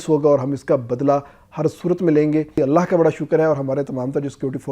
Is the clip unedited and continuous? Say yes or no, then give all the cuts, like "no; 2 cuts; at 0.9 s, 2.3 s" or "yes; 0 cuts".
no; 1 cut; at 2.6 s